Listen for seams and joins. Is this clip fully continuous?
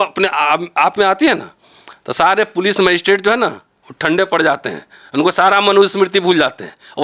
yes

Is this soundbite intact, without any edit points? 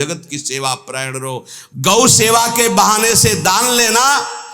no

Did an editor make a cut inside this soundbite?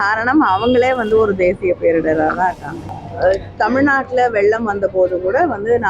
yes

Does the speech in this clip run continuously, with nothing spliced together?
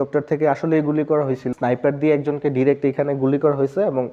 no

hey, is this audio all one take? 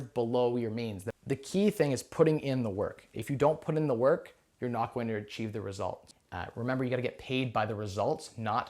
no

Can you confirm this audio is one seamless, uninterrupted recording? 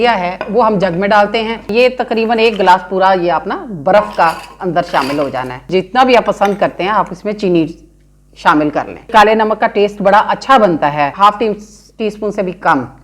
no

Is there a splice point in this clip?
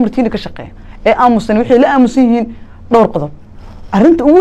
no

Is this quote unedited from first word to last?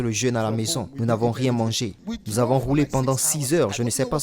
no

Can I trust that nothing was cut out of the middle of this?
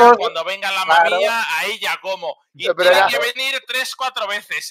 yes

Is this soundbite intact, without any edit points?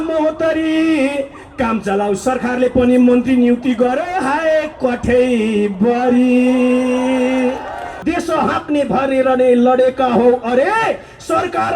no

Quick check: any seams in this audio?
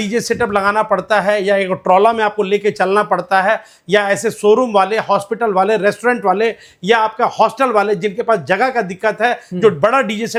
no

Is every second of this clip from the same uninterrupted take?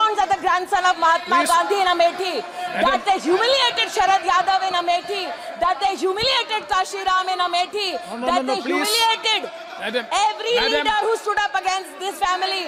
yes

